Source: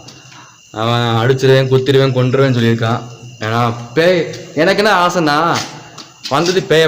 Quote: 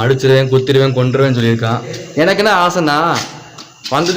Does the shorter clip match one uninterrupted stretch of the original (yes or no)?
no